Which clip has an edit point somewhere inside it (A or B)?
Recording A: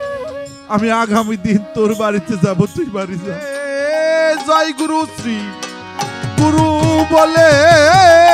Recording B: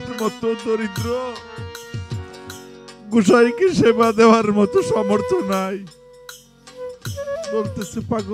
A